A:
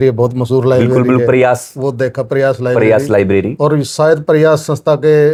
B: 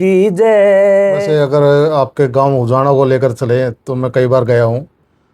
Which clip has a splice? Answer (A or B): B